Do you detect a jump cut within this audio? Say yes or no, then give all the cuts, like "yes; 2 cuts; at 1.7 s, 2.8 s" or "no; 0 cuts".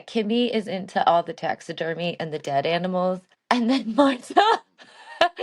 yes; 1 cut; at 3.3 s